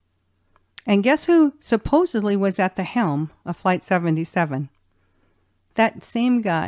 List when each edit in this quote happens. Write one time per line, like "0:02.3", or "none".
0:05.7